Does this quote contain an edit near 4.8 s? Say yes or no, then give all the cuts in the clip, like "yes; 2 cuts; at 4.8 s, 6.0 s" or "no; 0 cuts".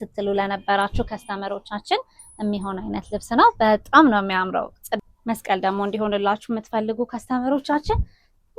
yes; 1 cut; at 4.8 s